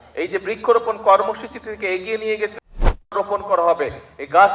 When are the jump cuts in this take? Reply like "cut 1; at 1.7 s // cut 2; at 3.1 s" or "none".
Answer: cut 1; at 3.1 s